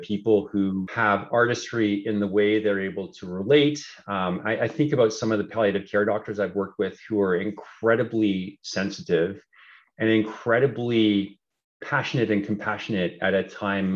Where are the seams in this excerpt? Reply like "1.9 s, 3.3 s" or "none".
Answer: 0.9 s